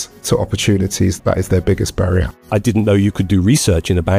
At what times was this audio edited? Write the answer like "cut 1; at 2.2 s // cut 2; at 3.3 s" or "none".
cut 1; at 1.1 s // cut 2; at 2.4 s